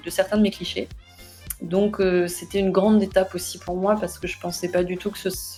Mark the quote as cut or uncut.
uncut